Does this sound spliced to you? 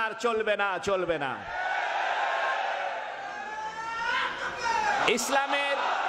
no; 0 cuts

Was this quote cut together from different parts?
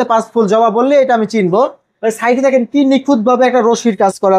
no; 0 cuts

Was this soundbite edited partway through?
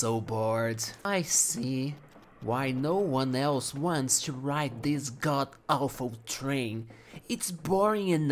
yes; 1 cut; at 1.1 s

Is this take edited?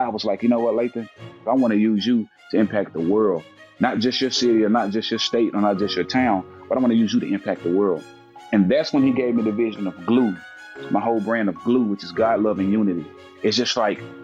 yes; 1 cut; at 1.3 s

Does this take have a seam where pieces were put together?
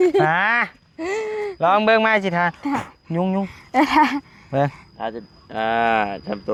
no; 0 cuts

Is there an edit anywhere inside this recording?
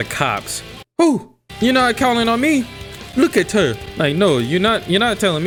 no; 0 cuts

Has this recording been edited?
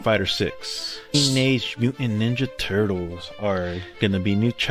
yes; 1 cut; at 1.1 s

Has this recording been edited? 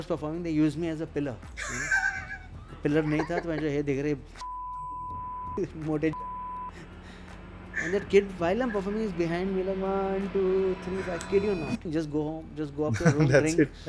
yes; 1 cut; at 11.9 s

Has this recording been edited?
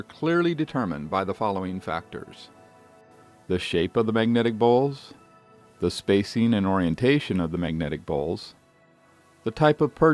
no; 0 cuts

